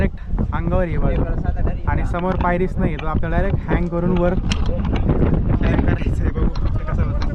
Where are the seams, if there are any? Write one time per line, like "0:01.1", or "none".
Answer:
none